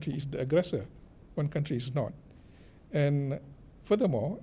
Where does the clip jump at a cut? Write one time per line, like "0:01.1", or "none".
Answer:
none